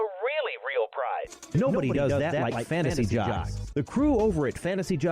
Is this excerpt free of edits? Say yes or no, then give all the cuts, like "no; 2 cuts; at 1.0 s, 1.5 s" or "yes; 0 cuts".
no; 1 cut; at 0.9 s